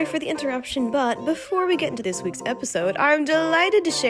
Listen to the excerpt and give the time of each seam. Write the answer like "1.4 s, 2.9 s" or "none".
2.0 s